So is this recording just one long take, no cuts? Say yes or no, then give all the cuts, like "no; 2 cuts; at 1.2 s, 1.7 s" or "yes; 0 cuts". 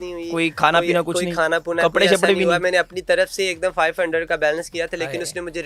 yes; 0 cuts